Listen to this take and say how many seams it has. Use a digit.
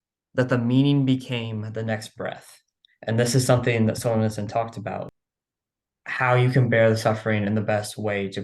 1